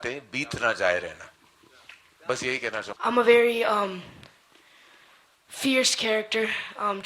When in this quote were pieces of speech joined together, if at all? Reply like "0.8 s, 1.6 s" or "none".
2.9 s